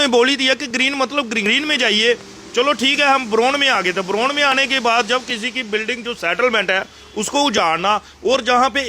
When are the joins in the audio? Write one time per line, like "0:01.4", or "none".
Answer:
0:01.4